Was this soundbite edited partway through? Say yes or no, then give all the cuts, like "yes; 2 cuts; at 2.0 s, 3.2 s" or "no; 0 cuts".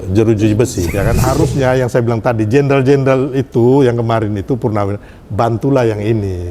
yes; 1 cut; at 0.9 s